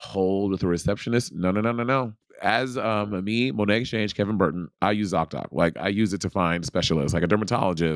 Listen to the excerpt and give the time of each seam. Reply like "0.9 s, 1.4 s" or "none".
2.2 s